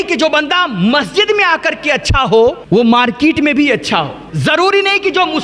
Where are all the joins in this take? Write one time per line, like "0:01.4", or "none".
0:02.6
0:04.2